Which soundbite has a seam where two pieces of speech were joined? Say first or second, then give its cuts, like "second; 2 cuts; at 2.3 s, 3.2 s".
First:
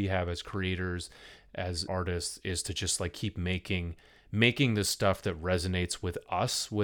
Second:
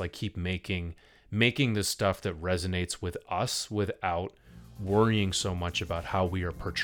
first; 1 cut; at 1.9 s